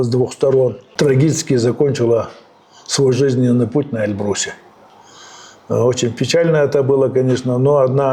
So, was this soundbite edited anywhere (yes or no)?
yes